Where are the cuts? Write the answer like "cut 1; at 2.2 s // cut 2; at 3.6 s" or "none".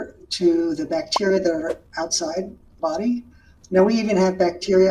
cut 1; at 2.8 s